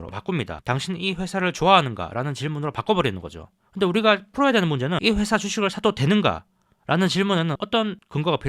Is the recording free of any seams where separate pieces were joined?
no; 1 cut; at 5.0 s

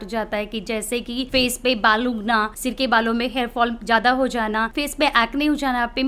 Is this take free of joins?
no; 3 cuts; at 1.3 s, 2.5 s, 4.8 s

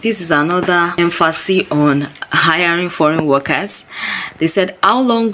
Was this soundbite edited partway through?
yes; 1 cut; at 0.9 s

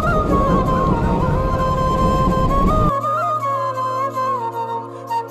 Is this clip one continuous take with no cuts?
yes; 0 cuts

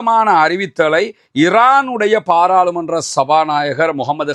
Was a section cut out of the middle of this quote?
no; 0 cuts

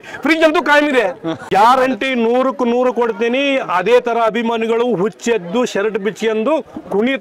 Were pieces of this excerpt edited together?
yes; 1 cut; at 1.4 s

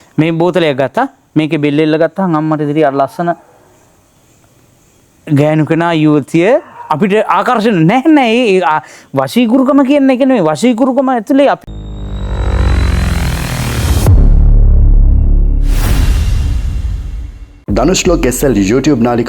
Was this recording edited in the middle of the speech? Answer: yes; 1 cut; at 11.6 s

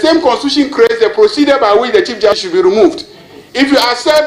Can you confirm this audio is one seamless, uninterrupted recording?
no; 1 cut; at 2.4 s

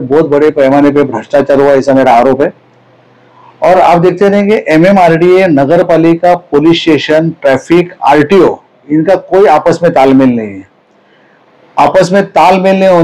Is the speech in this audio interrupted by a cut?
no; 0 cuts

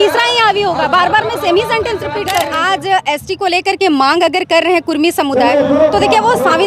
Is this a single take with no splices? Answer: no; 1 cut; at 2.5 s

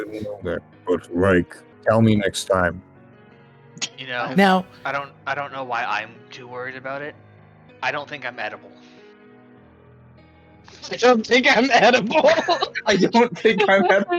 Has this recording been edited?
yes; 1 cut; at 1.6 s

